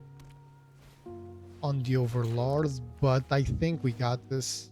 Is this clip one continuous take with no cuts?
no; 1 cut; at 1.4 s

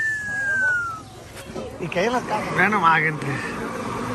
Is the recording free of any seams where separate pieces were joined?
no; 1 cut; at 2.4 s

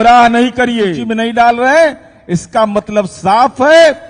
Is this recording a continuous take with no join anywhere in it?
no; 1 cut; at 1.0 s

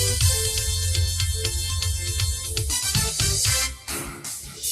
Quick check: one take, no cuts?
no; 1 cut; at 3.8 s

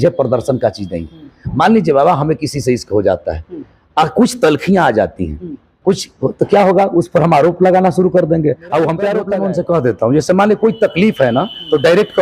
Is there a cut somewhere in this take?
yes; 1 cut; at 9.3 s

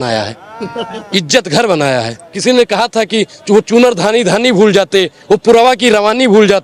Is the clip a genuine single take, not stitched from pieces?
no; 1 cut; at 2.2 s

